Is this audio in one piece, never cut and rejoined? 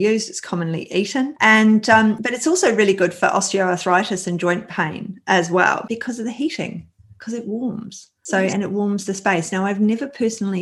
yes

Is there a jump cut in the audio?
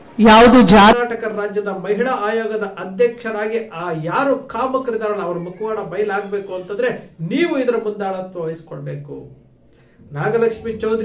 yes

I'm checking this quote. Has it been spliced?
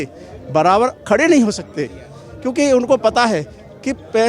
no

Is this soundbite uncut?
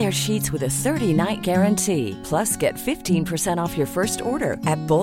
yes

